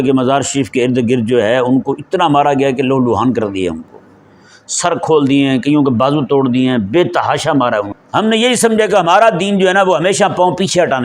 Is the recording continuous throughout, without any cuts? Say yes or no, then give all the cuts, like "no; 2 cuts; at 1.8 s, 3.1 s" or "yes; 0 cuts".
no; 1 cut; at 8.0 s